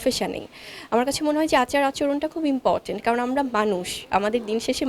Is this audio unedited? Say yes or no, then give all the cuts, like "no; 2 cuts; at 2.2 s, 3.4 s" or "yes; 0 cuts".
yes; 0 cuts